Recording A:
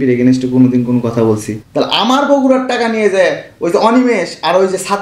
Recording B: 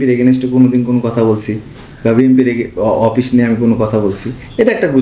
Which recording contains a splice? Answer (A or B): A